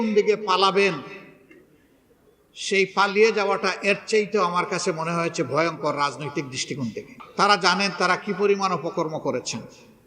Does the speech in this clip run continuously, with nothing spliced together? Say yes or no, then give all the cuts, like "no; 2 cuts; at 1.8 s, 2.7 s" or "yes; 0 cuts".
no; 1 cut; at 7.2 s